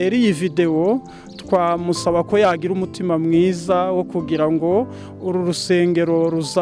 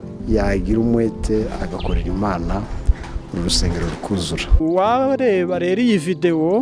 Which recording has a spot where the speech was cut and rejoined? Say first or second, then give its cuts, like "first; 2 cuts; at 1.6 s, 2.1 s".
second; 1 cut; at 4.4 s